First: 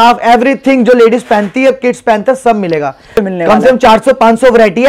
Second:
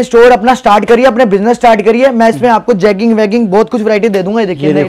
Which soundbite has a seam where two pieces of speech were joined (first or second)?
first